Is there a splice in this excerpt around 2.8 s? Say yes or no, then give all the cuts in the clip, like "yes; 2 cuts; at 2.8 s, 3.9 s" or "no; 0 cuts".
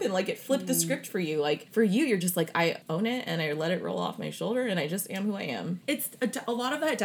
yes; 3 cuts; at 1.6 s, 2.8 s, 5.8 s